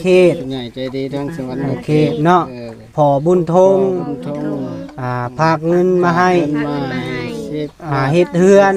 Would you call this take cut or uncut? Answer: uncut